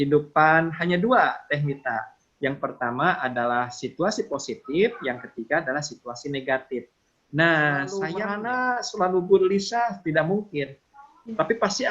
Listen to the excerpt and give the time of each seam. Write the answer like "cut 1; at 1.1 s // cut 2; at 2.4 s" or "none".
cut 1; at 8.1 s